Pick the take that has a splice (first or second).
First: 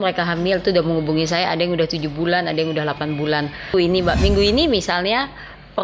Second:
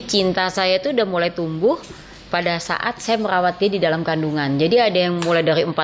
first